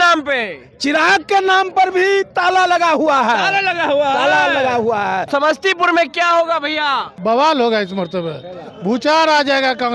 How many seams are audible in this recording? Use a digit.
2